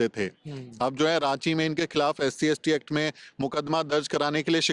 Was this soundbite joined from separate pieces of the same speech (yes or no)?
no